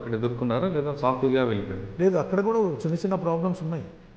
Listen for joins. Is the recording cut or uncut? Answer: cut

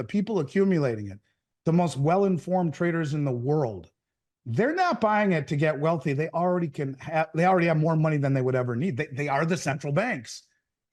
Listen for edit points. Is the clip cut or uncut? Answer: uncut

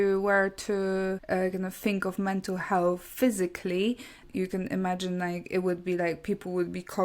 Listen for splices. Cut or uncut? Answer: cut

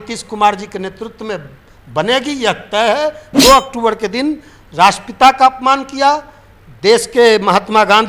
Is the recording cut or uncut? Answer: cut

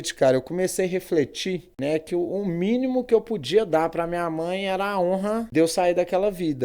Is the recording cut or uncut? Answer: cut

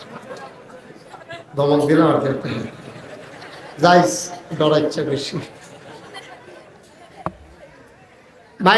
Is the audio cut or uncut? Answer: uncut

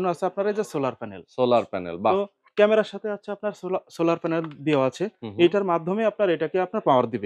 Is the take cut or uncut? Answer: uncut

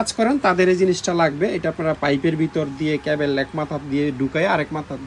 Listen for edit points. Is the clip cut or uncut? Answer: uncut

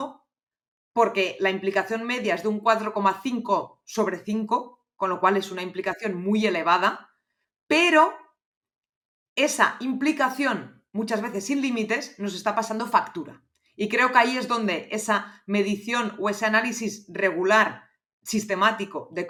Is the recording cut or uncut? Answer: uncut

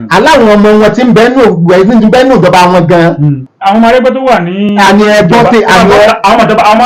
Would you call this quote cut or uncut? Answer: uncut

